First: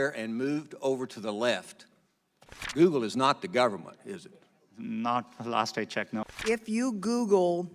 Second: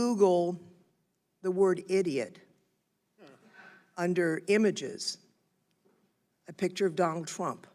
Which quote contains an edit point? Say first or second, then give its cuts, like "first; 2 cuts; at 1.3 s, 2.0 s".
first; 2 cuts; at 2.7 s, 6.2 s